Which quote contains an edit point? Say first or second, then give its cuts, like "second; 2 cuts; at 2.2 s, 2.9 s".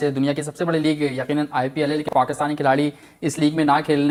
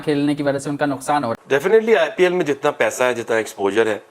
second; 1 cut; at 1.4 s